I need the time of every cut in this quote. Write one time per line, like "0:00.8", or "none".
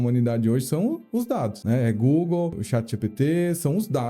0:01.6
0:02.6